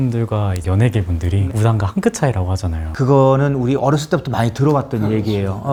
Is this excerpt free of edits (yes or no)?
yes